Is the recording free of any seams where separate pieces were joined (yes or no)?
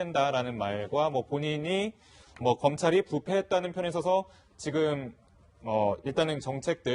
yes